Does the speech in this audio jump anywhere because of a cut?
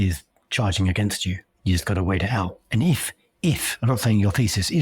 yes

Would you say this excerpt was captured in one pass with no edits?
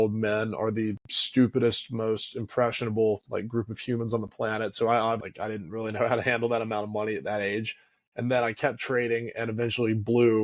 no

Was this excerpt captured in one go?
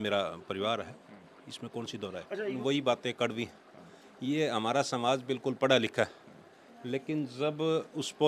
no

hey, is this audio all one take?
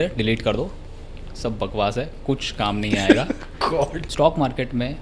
no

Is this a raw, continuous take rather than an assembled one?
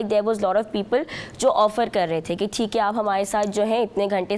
yes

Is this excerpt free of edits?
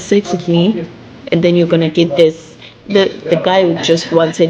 yes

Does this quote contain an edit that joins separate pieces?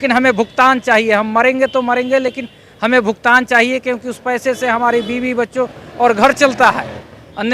no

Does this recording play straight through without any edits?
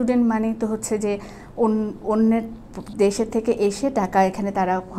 yes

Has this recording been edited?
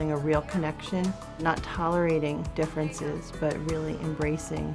yes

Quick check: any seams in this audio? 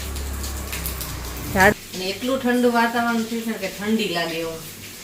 yes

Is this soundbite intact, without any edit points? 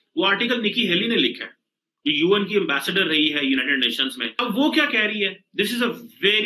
no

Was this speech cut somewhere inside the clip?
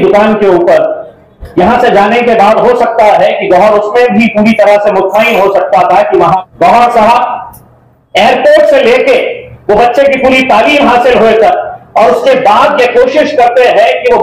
yes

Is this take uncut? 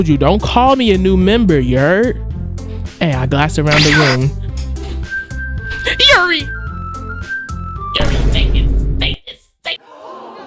yes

